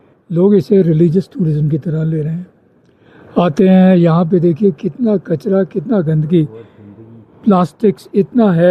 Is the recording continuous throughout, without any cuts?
yes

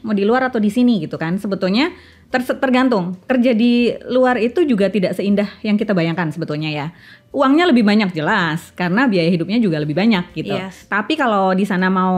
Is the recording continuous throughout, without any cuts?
yes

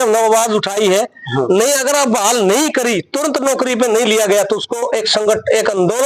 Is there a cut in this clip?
no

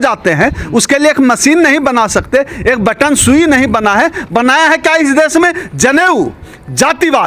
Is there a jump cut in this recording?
no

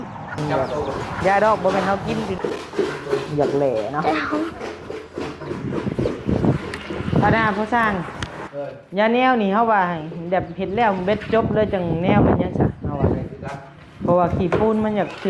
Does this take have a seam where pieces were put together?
yes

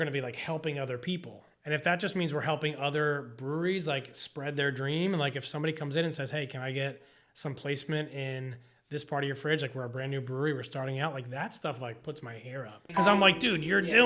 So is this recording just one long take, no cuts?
no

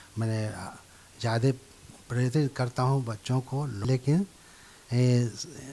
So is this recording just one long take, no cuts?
no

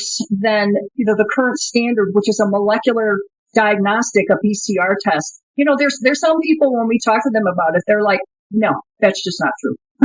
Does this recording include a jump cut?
yes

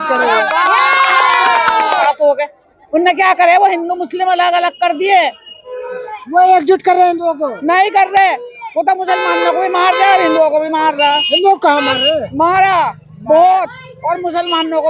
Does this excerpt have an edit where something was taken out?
yes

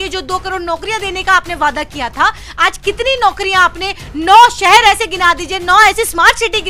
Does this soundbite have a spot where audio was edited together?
no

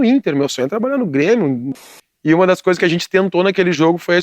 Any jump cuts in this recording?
yes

